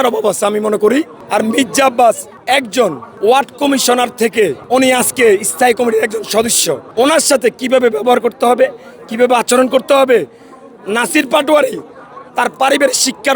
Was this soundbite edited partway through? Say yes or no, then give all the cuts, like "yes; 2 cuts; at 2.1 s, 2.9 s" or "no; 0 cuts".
yes; 4 cuts; at 1.2 s, 2.7 s, 4.6 s, 6.8 s